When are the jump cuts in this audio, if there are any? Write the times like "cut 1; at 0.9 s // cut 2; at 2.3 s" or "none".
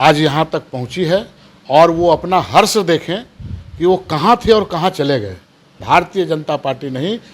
cut 1; at 5.8 s